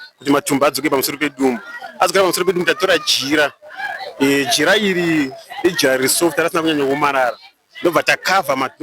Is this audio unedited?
yes; 0 cuts

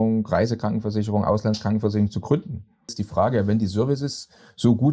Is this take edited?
yes; 1 cut; at 2.9 s

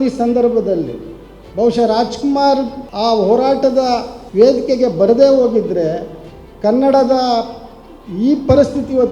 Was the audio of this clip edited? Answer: yes; 2 cuts; at 2.8 s, 4.2 s

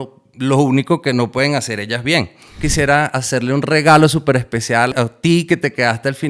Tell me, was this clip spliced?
yes; 2 cuts; at 2.6 s, 4.9 s

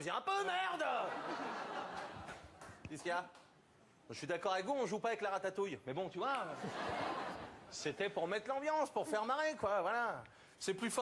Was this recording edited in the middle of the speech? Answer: yes; 1 cut; at 7.3 s

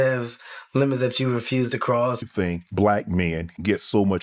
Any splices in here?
yes; 1 cut; at 2.2 s

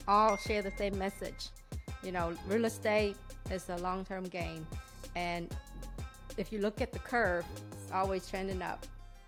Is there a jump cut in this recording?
no; 0 cuts

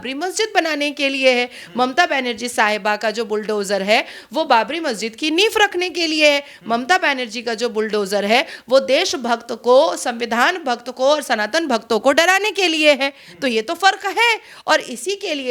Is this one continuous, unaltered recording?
yes; 0 cuts

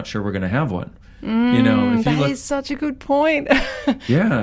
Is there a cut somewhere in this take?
no; 0 cuts

